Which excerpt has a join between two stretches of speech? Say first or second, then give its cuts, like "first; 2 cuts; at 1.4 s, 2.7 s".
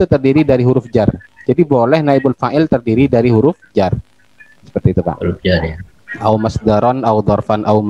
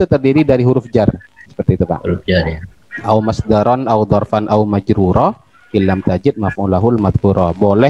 second; 1 cut; at 1.3 s